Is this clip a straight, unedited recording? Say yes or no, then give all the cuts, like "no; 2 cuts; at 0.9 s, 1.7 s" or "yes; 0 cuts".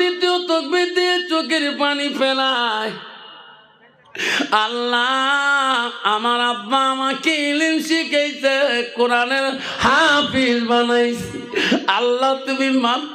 yes; 0 cuts